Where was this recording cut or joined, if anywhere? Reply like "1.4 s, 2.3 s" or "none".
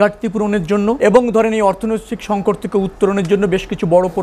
1.0 s